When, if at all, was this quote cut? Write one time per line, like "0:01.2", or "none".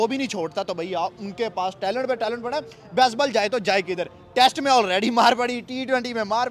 none